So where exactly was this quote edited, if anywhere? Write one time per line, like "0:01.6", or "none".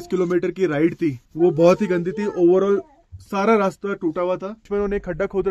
0:01.2
0:04.7